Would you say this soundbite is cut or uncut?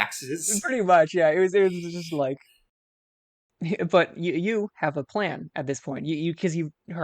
cut